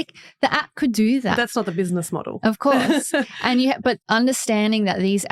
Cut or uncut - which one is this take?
uncut